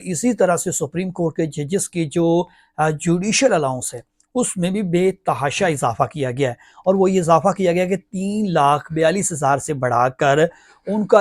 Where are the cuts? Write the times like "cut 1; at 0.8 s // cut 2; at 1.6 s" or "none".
none